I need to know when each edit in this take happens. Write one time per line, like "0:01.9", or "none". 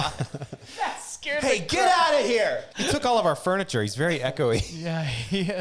0:02.7